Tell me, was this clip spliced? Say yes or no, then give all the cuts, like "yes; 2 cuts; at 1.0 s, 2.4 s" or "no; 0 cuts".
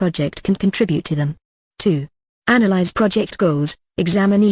yes; 1 cut; at 3.4 s